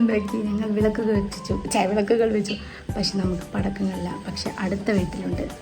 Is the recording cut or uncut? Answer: uncut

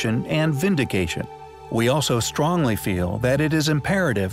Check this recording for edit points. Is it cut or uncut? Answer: cut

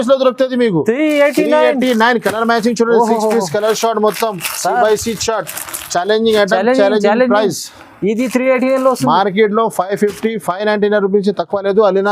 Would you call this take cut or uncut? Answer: uncut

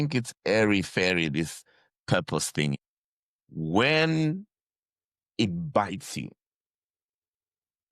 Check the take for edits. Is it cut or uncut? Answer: cut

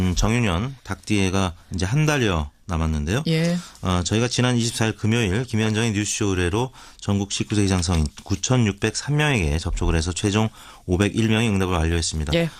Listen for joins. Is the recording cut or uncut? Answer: uncut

